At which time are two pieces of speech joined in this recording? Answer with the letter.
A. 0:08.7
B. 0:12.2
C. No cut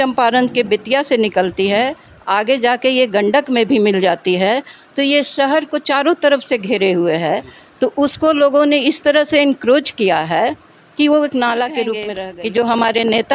B